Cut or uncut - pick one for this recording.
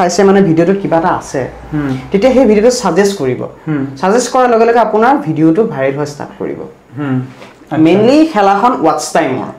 uncut